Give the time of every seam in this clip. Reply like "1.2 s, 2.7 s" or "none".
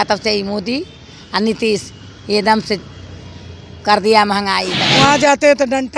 4.8 s